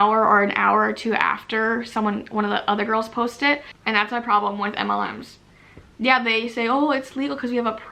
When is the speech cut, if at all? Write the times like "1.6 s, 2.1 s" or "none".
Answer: 3.7 s